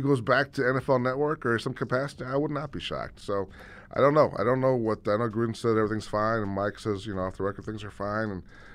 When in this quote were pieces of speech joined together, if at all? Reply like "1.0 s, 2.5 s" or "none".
3.1 s